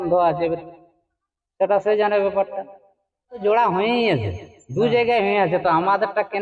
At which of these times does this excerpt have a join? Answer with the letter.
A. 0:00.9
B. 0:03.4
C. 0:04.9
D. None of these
B